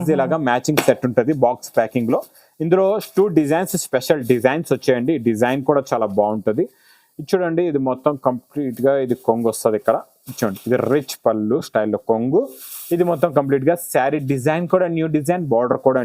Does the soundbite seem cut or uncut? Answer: uncut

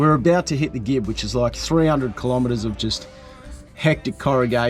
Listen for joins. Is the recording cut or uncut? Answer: uncut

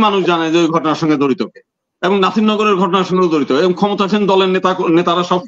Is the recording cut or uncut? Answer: uncut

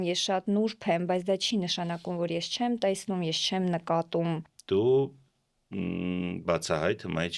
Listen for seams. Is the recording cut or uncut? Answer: cut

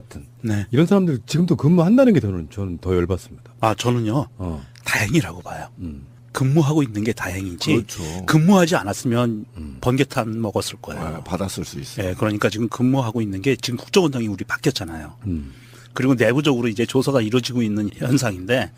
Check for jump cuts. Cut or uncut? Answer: uncut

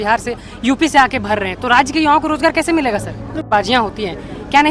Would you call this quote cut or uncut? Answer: cut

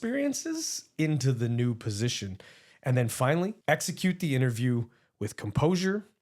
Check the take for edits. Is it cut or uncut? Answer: cut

